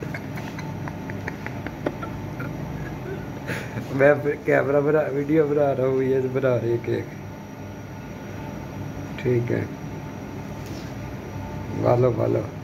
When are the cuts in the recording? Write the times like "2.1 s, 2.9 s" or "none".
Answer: none